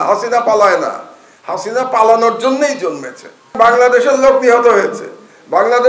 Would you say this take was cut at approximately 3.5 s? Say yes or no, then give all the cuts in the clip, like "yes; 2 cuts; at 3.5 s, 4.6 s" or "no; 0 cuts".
yes; 1 cut; at 3.5 s